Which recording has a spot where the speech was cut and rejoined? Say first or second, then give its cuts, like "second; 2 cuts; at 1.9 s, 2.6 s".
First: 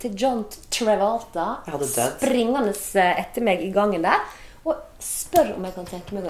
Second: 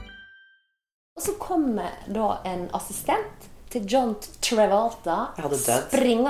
second; 1 cut; at 1.1 s